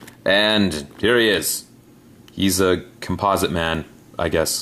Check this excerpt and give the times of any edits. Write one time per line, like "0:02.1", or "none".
0:01.8

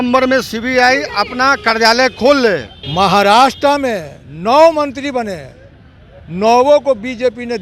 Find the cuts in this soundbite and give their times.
0:02.8

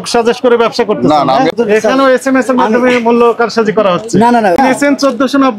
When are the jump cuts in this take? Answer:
0:01.5
0:04.6

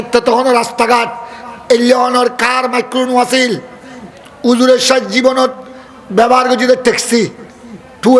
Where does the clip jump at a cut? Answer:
none

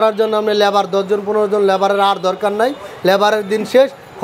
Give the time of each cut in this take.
none

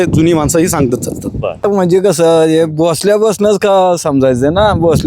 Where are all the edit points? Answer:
0:01.6

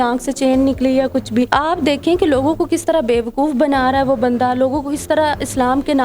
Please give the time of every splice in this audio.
0:01.5

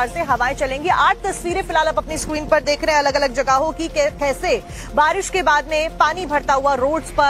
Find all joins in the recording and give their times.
0:05.7

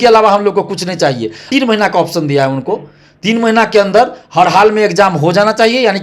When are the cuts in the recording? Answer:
0:01.5

